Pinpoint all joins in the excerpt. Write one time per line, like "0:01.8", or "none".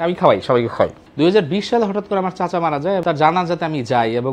0:01.0
0:03.0